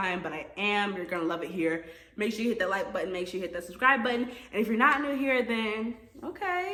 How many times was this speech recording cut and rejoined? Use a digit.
0